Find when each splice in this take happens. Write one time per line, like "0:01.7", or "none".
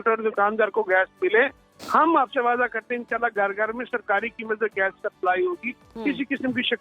none